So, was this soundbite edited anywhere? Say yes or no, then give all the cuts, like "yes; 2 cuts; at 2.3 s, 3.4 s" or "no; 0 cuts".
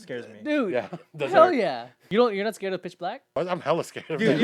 yes; 2 cuts; at 1.9 s, 3.4 s